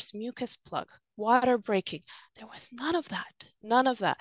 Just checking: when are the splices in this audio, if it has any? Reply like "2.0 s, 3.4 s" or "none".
none

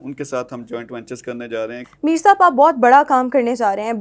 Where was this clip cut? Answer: 1.8 s

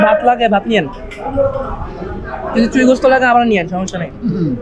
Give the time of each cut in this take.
none

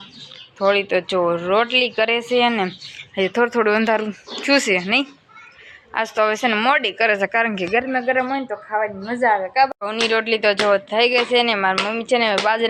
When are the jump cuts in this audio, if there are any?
9.7 s

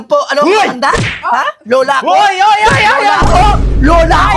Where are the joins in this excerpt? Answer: none

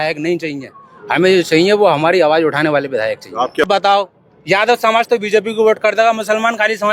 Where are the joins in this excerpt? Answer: 3.7 s

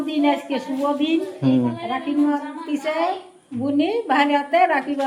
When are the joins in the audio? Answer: none

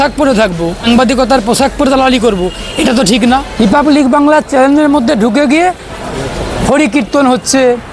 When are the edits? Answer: 0.8 s, 3.5 s

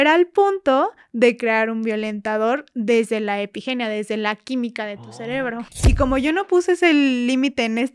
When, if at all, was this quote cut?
5.7 s

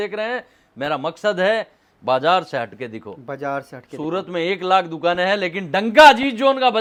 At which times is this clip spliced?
none

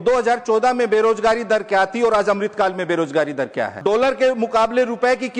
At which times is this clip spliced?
3.7 s

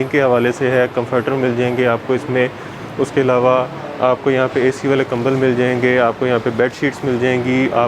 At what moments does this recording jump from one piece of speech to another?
none

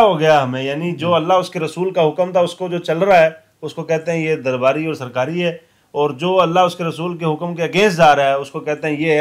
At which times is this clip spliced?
none

